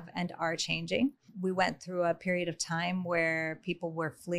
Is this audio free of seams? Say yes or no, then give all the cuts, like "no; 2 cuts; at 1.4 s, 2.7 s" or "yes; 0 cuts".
no; 1 cut; at 1.3 s